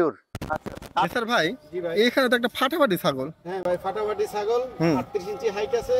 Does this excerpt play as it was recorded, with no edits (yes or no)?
no